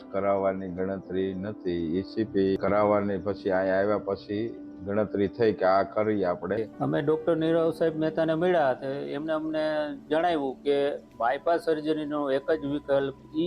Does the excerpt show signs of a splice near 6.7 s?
yes; 1 cut; at 6.7 s

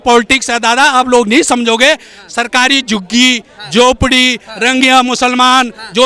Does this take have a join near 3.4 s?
no; 0 cuts

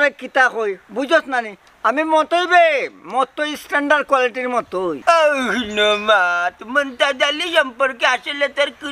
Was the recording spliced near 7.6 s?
no; 1 cut; at 5.0 s

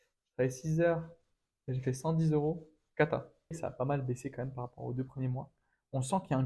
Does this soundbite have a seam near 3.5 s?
yes; 1 cut; at 3.5 s

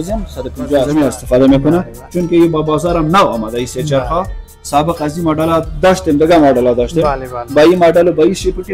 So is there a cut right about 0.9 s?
yes; 1 cut; at 0.9 s

